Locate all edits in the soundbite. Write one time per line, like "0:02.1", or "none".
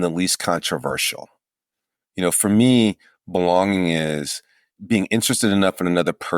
0:04.7